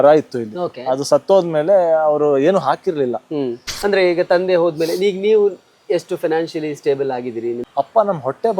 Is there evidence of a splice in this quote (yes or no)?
yes